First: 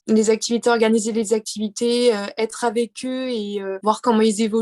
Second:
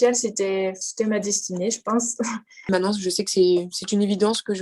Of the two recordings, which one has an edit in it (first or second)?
second